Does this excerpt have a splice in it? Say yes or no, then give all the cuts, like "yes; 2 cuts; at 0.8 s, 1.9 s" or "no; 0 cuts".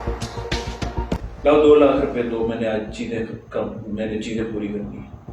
yes; 1 cut; at 1.2 s